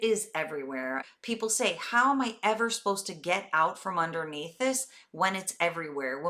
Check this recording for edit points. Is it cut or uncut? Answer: cut